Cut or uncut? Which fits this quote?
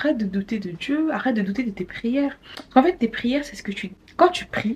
uncut